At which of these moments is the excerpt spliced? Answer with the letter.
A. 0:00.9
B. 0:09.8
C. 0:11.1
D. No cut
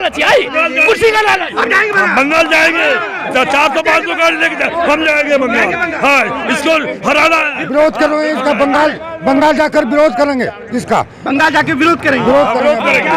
D